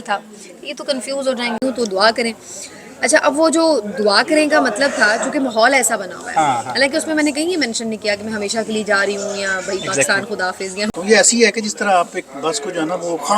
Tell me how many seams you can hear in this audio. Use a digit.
2